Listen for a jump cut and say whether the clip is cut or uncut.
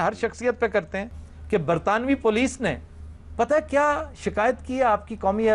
cut